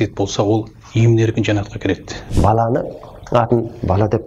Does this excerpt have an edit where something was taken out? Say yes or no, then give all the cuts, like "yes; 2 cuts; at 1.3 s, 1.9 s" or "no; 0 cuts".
yes; 1 cut; at 2.2 s